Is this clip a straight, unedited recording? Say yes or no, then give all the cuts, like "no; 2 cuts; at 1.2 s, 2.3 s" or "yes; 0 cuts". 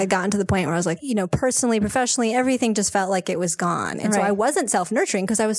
no; 1 cut; at 1.0 s